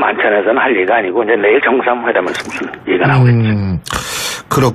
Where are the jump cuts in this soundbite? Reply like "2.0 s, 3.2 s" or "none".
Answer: 2.0 s